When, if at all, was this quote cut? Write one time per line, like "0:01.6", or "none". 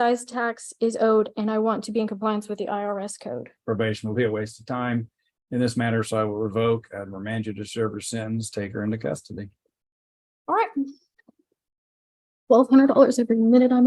0:03.5